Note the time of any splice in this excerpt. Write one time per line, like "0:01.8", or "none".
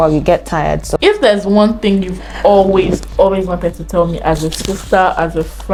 none